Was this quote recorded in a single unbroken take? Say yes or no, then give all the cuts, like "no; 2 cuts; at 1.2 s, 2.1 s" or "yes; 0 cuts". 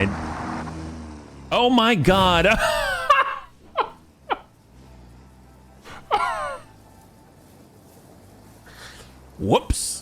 yes; 0 cuts